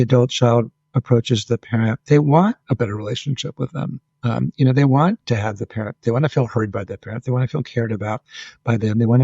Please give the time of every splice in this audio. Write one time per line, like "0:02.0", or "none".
0:02.0